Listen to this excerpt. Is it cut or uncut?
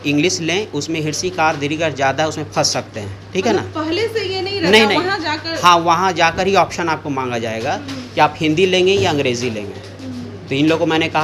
uncut